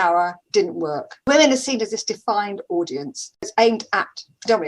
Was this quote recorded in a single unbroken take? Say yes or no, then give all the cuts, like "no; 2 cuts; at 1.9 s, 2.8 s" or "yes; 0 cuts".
no; 1 cut; at 1.3 s